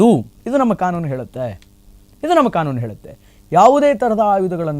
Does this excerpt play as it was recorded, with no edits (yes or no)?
yes